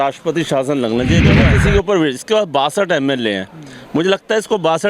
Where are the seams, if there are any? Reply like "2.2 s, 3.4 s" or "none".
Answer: 1.4 s